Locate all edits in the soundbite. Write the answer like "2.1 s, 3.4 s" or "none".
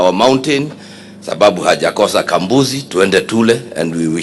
none

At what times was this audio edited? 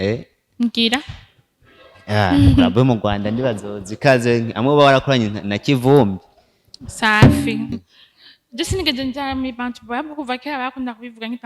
7.7 s

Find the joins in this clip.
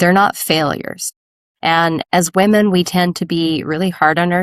none

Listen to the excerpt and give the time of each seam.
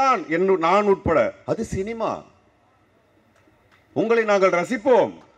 none

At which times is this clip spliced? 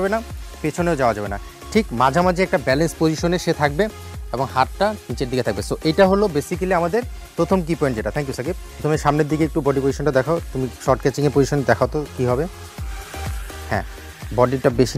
none

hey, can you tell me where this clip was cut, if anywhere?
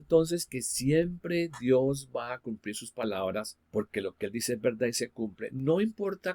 3.6 s

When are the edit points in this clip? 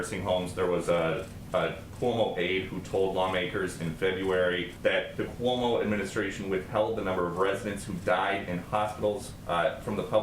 none

